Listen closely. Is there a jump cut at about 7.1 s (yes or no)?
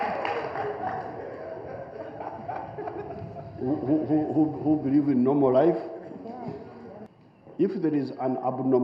yes